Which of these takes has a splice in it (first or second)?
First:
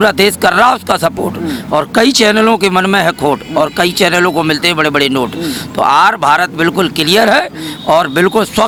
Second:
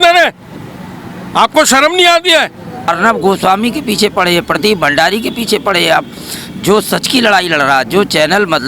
second